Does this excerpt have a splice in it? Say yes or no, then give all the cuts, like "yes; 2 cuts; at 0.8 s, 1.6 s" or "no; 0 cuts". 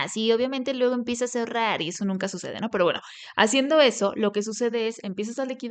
no; 0 cuts